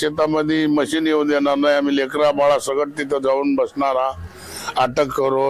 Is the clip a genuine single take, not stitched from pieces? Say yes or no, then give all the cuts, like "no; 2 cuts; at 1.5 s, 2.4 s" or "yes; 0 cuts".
yes; 0 cuts